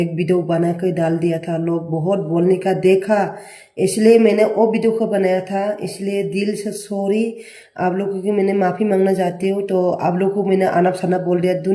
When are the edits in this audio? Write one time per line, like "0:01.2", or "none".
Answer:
none

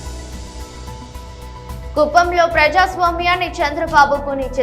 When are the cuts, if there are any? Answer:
none

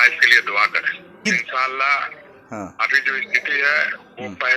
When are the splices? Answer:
0:01.3

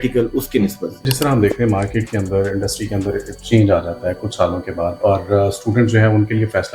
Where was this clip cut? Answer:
0:01.1

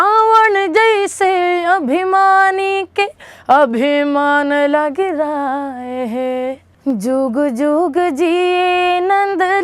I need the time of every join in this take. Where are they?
0:06.7

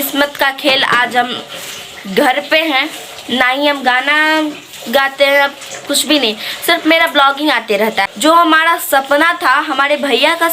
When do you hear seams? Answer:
0:08.0

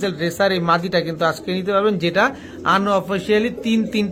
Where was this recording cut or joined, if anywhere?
none

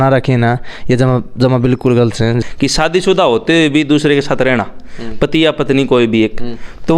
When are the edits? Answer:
0:02.5

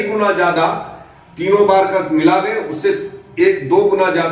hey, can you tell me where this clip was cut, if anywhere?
none

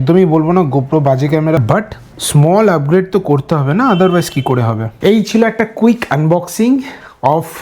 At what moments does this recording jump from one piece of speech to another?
none

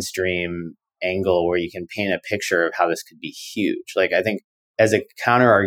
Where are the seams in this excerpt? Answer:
0:04.6

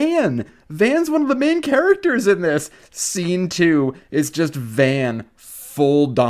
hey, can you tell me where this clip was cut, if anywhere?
none

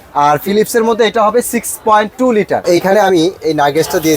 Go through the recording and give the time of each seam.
0:02.6

